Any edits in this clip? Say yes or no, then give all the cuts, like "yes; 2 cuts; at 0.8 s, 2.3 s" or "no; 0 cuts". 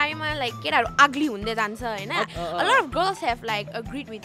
yes; 1 cut; at 2.3 s